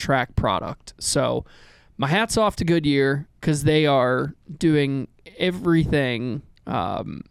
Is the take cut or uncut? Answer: uncut